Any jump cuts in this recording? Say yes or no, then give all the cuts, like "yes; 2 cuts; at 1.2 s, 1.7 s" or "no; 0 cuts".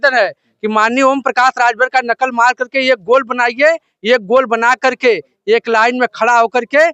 no; 0 cuts